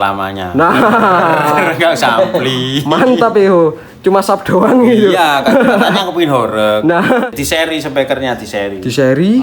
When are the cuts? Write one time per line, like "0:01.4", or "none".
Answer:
0:07.3